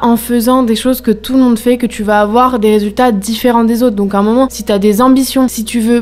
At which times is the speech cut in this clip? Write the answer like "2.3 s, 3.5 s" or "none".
none